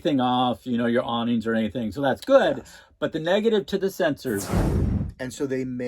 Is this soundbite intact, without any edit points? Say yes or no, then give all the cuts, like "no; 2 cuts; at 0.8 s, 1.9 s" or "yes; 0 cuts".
no; 1 cut; at 4.8 s